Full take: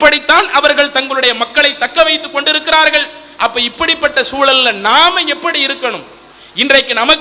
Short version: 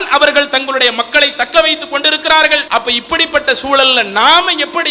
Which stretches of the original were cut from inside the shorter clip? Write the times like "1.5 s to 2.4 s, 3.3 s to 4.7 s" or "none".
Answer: 3.1 s to 3.3 s